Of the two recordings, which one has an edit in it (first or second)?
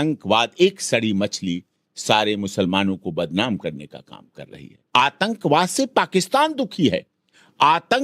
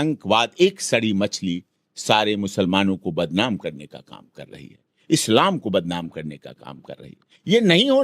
first